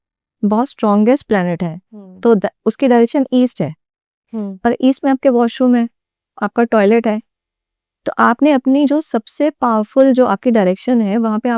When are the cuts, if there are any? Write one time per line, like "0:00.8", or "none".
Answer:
none